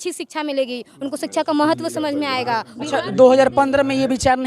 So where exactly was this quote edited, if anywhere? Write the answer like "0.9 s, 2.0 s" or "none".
2.7 s